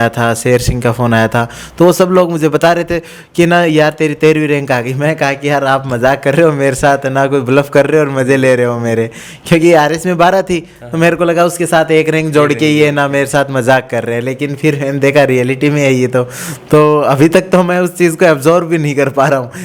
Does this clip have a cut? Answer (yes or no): no